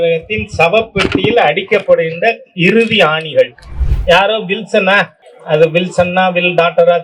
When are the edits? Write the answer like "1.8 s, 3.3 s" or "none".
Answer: 3.8 s